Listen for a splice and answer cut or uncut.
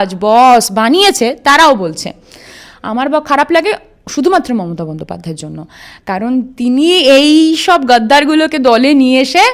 uncut